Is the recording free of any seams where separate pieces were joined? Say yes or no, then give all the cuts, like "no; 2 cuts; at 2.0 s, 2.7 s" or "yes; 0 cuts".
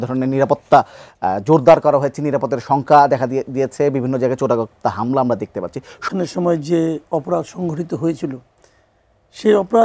no; 1 cut; at 6.0 s